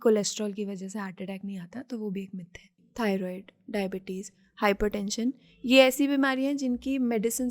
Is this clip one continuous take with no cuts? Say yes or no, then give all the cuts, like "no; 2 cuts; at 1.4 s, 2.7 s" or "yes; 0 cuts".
no; 1 cut; at 2.8 s